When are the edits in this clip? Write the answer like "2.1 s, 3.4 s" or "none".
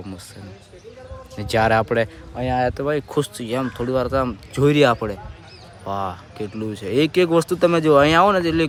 none